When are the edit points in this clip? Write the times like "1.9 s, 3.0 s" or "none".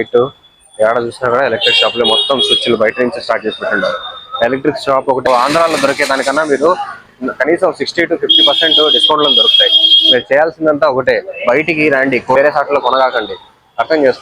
5.2 s, 12.4 s